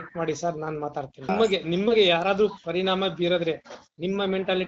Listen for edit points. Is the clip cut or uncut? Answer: cut